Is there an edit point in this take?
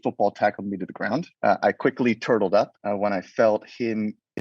yes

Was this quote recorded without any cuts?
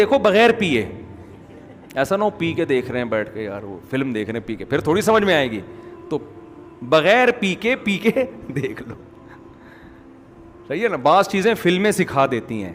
yes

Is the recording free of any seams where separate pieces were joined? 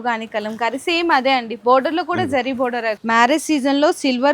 no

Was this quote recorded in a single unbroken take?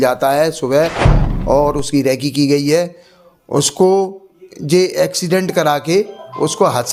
yes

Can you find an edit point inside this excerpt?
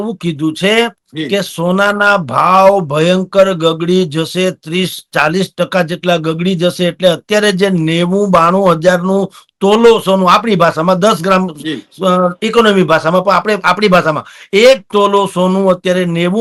no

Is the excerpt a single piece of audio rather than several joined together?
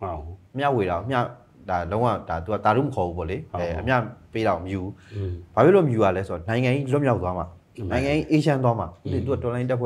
yes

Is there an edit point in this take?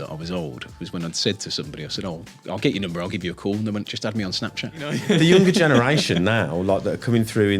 yes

